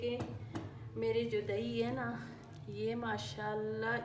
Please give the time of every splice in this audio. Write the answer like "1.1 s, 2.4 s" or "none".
none

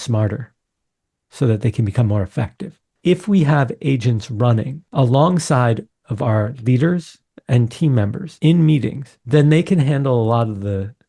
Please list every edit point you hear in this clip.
2.8 s, 4.8 s, 8.2 s, 9.1 s

